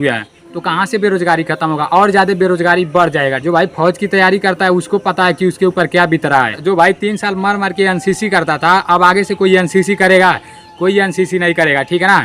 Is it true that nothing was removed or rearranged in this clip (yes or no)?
no